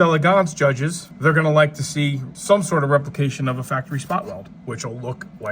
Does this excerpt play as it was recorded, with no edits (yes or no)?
no